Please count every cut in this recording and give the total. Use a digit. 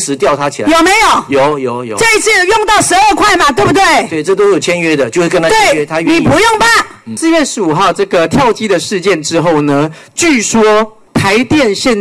2